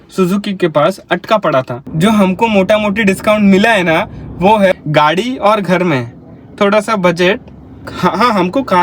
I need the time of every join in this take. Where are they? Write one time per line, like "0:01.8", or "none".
0:01.8
0:04.7
0:07.9